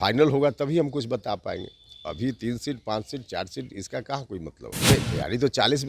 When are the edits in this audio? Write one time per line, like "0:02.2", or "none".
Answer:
0:04.9